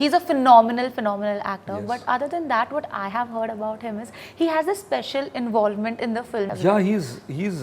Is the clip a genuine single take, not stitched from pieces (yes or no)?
no